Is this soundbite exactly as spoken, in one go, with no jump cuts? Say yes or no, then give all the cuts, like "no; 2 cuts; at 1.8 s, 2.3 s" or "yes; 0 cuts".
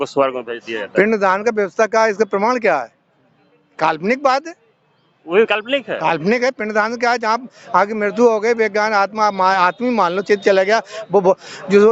yes; 0 cuts